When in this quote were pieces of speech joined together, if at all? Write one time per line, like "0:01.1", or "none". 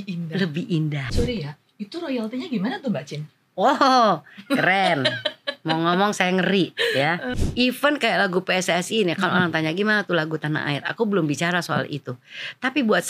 0:01.1
0:07.3